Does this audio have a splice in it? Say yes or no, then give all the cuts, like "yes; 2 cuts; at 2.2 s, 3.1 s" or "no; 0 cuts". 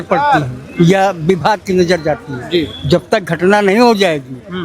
no; 0 cuts